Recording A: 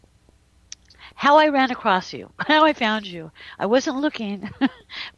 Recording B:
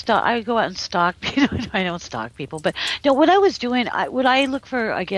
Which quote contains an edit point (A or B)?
B